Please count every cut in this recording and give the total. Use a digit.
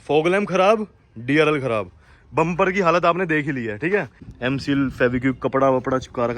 1